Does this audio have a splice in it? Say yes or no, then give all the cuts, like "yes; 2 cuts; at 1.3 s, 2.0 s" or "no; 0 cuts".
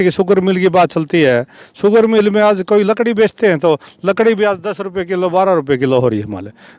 no; 0 cuts